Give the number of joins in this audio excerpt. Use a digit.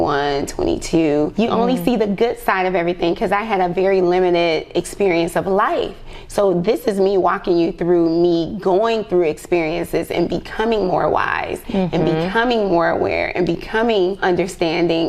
2